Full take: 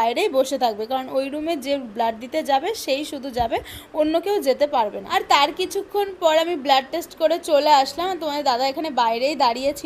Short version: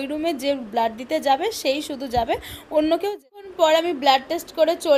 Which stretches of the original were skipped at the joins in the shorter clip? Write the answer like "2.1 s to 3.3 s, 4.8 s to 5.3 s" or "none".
4.4 s to 5.8 s